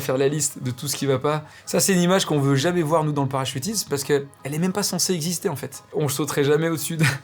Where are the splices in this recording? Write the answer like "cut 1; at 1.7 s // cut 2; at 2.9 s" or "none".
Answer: cut 1; at 1.5 s // cut 2; at 5.8 s

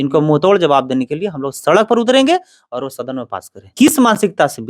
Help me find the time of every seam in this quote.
cut 1; at 3.7 s

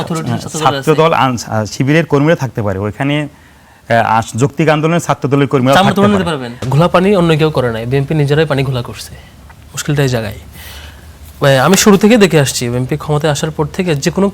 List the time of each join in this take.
cut 1; at 6.5 s

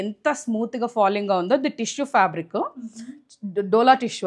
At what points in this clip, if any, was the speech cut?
none

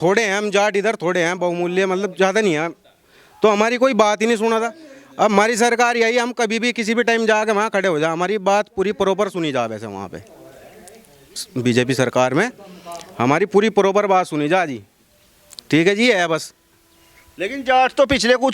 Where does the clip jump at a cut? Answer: none

